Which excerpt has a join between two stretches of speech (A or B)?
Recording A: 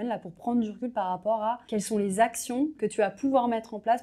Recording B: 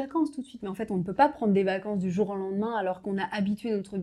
A